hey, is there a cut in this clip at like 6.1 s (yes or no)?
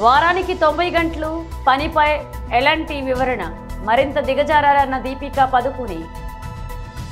yes